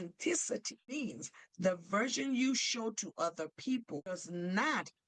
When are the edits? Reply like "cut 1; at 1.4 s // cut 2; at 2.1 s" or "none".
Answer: cut 1; at 1.0 s // cut 2; at 4.2 s